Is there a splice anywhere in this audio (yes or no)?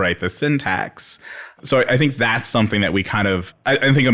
no